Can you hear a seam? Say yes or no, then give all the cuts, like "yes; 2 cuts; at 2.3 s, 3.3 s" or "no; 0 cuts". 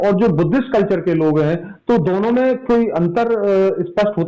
no; 0 cuts